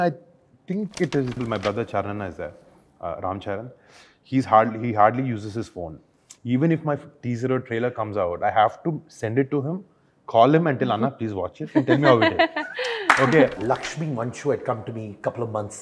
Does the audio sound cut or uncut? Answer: cut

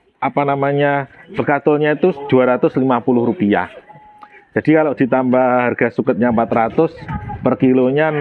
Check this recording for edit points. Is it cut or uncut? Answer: uncut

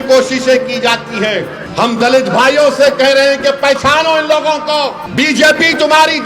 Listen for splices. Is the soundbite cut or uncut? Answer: cut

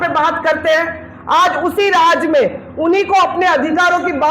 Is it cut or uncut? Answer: uncut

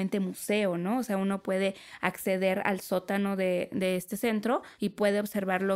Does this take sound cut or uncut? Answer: cut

